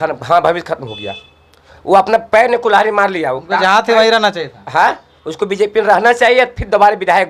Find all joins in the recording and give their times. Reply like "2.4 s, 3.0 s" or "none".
none